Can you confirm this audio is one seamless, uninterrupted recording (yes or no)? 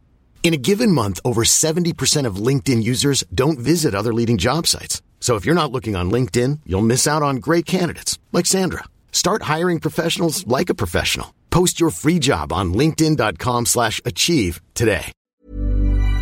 no